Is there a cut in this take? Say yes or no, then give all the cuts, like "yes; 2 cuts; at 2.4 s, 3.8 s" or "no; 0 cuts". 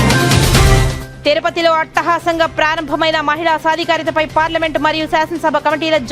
yes; 1 cut; at 0.9 s